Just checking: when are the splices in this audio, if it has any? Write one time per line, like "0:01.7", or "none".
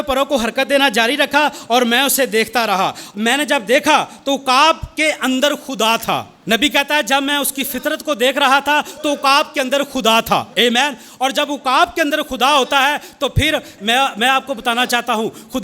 0:03.0
0:06.3
0:10.5
0:13.8